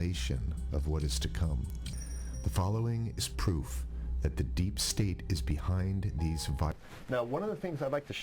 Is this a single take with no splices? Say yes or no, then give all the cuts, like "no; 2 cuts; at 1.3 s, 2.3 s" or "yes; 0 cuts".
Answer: no; 1 cut; at 6.7 s